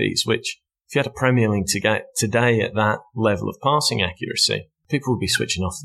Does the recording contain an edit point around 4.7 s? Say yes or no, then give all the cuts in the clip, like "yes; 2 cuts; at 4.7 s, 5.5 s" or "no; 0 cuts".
yes; 1 cut; at 4.7 s